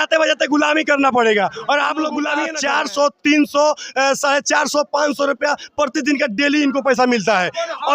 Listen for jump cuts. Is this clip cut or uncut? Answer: cut